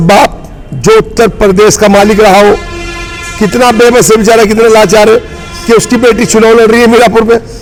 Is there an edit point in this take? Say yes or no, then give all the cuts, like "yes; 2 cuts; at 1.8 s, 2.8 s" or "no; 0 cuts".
no; 0 cuts